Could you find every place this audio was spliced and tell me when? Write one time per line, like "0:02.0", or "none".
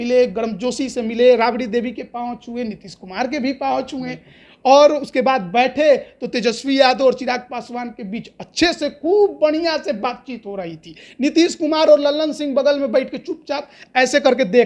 none